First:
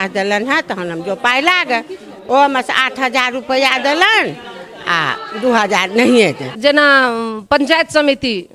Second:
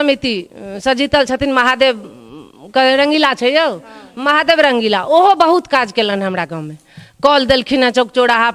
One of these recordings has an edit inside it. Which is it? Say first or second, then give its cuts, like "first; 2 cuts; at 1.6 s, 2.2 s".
first; 1 cut; at 6.5 s